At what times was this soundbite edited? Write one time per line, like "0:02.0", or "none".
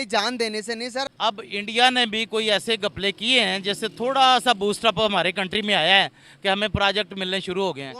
0:01.1